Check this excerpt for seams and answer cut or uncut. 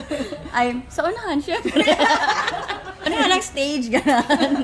cut